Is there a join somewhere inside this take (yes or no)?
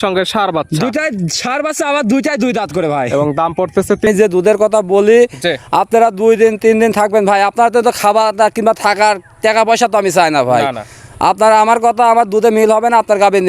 yes